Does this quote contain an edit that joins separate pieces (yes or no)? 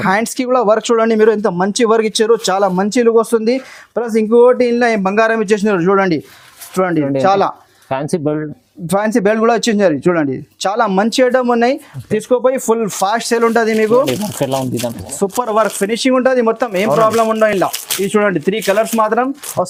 no